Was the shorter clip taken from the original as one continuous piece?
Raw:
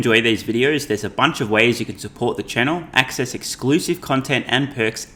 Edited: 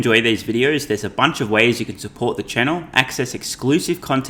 yes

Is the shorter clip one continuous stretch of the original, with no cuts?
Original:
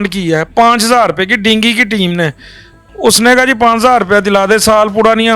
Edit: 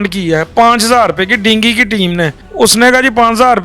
no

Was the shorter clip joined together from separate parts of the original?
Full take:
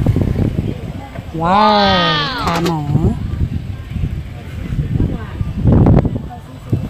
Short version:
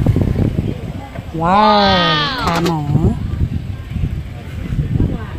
no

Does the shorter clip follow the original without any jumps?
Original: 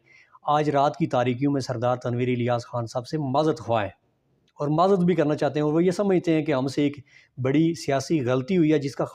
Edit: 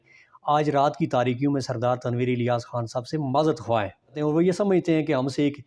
no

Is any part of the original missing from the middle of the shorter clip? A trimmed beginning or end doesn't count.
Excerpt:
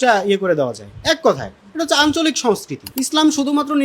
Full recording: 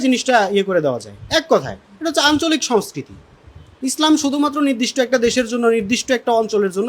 yes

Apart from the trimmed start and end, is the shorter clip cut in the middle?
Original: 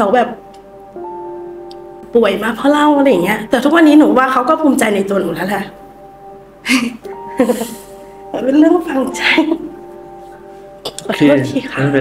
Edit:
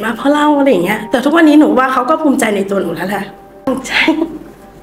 yes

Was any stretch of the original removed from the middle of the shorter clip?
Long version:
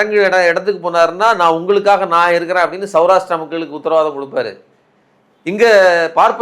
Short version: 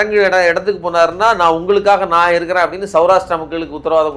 no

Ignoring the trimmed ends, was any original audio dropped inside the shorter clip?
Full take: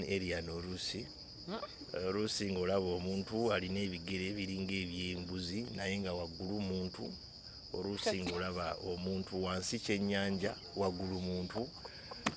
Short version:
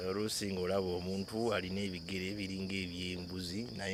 no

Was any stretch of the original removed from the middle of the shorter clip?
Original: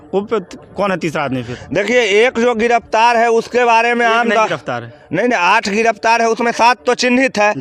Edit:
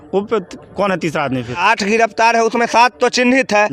yes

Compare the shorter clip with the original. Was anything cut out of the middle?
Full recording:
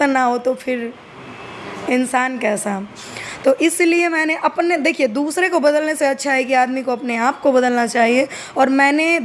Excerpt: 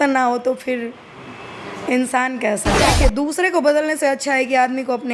yes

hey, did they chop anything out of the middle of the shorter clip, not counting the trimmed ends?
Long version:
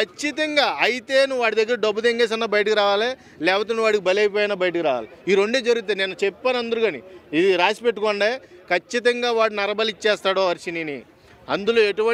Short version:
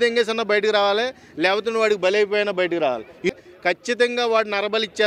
yes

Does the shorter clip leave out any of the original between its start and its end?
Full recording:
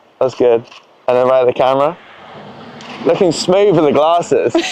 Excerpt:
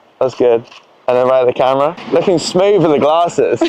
yes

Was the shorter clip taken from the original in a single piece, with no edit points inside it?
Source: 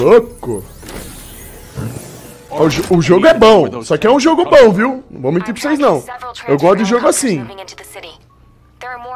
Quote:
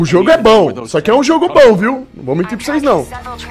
yes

